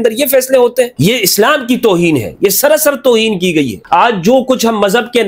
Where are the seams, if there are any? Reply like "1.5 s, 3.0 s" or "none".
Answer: 3.8 s